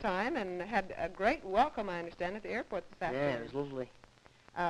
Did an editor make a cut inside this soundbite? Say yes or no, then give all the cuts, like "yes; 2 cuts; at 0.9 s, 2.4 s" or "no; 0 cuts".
no; 0 cuts